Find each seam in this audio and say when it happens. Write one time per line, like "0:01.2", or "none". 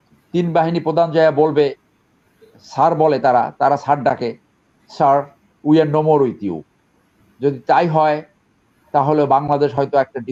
none